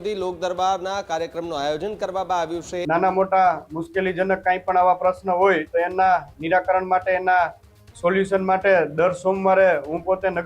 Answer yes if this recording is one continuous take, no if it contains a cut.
no